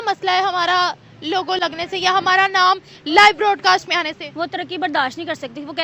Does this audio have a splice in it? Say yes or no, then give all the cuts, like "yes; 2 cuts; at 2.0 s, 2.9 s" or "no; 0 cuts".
no; 0 cuts